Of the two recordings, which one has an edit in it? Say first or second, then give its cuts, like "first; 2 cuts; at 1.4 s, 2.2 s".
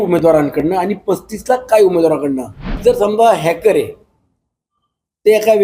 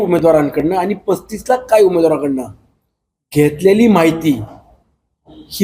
first; 1 cut; at 2.8 s